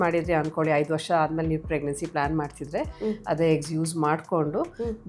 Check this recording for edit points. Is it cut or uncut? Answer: uncut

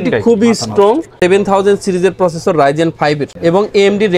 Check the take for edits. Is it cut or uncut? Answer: cut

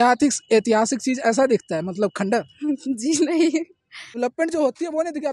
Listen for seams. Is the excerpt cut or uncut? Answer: cut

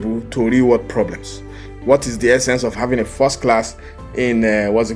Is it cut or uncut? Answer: uncut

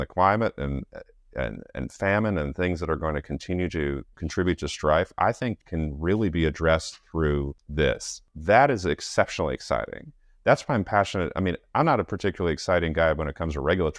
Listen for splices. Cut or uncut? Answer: cut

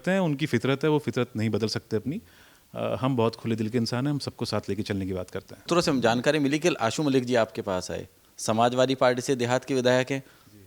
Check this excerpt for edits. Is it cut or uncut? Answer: cut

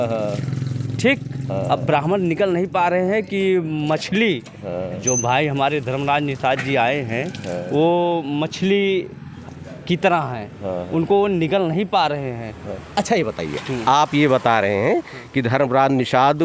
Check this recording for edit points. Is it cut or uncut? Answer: uncut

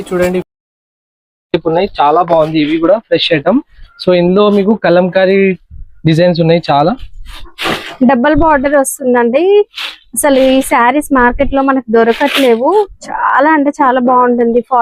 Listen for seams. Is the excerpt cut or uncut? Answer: uncut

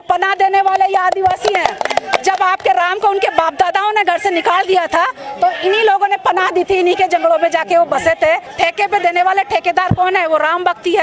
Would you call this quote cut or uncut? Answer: cut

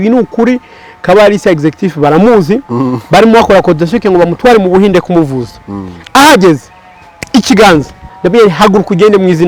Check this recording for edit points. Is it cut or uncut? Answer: cut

